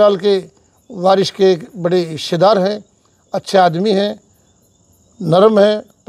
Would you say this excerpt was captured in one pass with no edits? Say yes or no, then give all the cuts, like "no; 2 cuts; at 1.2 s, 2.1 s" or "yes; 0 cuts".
yes; 0 cuts